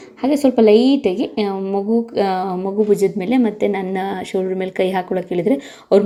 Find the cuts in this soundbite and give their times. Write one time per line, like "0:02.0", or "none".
none

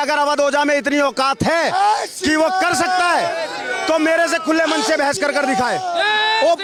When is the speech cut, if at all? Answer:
none

